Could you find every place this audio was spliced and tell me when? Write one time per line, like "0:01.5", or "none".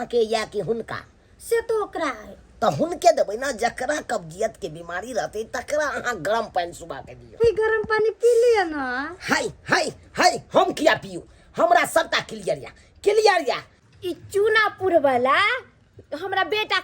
0:07.4
0:13.8